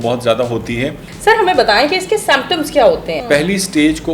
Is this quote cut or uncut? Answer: cut